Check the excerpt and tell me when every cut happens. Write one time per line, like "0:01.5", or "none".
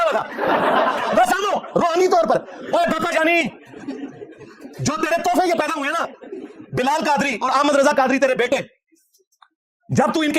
none